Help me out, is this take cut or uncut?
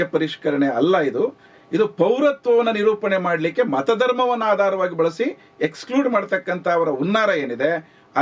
uncut